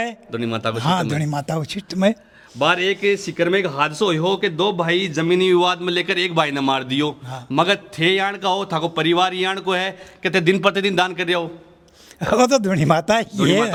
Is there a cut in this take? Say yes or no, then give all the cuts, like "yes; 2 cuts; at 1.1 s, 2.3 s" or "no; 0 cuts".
no; 0 cuts